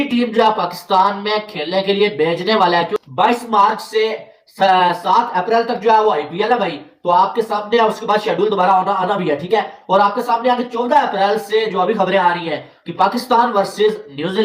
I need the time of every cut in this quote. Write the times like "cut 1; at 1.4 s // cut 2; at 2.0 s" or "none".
none